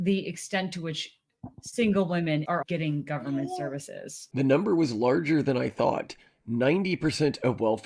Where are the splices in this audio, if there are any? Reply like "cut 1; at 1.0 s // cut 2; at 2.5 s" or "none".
cut 1; at 2.5 s // cut 2; at 4.3 s